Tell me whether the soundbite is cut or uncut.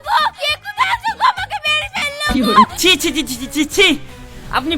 cut